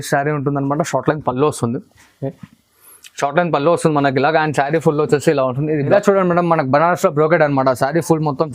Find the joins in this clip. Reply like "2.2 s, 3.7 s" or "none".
5.8 s